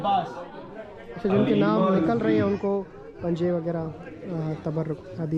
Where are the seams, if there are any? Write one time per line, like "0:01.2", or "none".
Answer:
none